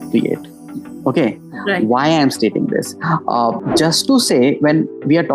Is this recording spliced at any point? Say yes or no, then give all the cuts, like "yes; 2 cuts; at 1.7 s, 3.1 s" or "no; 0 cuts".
yes; 1 cut; at 3.6 s